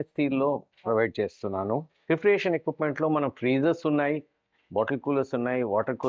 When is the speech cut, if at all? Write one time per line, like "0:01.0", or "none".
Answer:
0:01.9